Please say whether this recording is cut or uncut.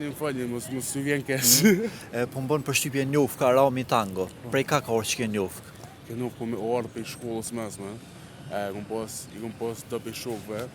uncut